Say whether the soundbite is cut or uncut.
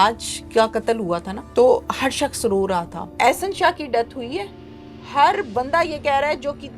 cut